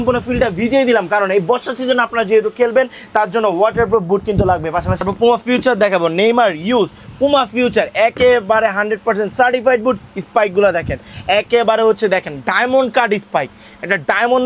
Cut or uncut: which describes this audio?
cut